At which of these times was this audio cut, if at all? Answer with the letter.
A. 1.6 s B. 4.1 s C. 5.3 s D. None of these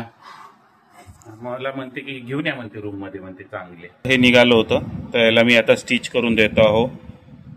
B